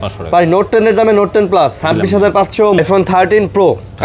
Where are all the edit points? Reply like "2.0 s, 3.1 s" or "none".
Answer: 2.8 s